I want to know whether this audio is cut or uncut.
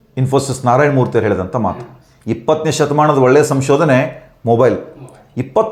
uncut